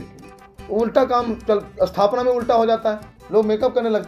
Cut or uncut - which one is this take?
cut